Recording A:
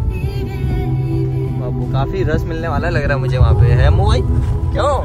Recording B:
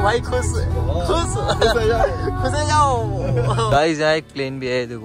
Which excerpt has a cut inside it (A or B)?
B